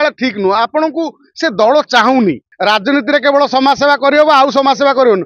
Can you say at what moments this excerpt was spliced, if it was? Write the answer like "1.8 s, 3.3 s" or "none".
2.5 s